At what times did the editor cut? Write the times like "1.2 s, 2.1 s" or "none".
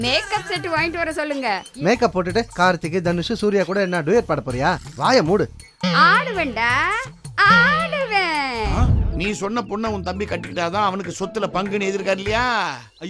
1.7 s, 9.0 s